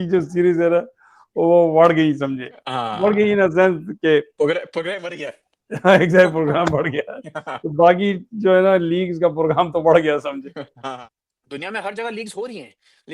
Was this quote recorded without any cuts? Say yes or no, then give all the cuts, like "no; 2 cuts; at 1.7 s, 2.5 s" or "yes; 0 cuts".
no; 1 cut; at 10.8 s